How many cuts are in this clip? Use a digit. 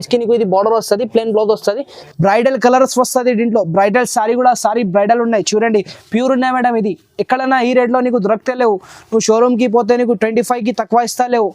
1